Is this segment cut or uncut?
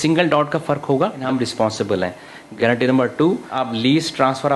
cut